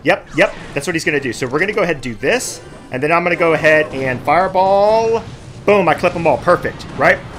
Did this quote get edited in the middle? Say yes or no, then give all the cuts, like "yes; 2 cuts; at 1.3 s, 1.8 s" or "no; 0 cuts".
no; 0 cuts